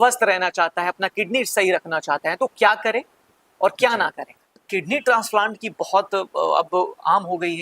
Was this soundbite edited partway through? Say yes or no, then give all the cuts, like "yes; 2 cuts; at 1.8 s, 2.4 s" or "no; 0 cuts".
yes; 1 cut; at 4.6 s